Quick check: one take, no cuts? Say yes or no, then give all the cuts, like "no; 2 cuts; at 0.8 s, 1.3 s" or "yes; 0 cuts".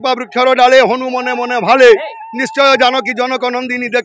yes; 0 cuts